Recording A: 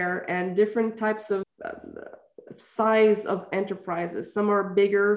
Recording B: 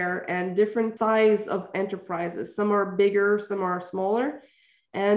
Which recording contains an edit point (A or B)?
B